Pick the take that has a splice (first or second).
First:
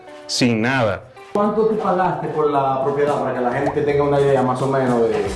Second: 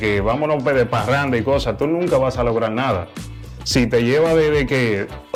first